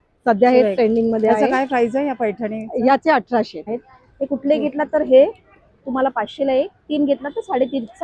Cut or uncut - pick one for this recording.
cut